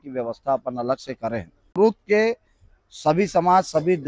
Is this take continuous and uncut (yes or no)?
no